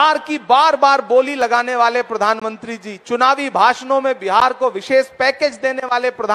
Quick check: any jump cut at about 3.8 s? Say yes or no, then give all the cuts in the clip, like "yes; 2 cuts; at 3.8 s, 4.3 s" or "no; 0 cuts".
no; 0 cuts